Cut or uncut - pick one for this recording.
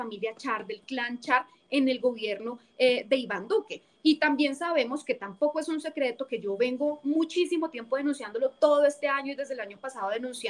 uncut